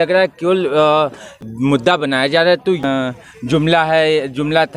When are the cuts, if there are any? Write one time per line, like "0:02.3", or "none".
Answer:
0:01.4
0:02.8